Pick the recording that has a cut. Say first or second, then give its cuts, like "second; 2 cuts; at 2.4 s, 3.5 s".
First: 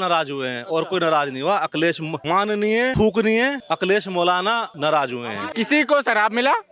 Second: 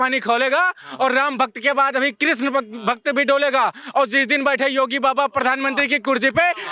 first; 4 cuts; at 2.4 s, 3.6 s, 4.7 s, 5.4 s